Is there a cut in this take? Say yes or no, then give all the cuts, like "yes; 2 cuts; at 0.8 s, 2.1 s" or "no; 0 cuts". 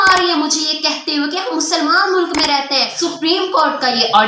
yes; 1 cut; at 2.9 s